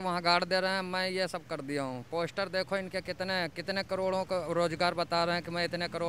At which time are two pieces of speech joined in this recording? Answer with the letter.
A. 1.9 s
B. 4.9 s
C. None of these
C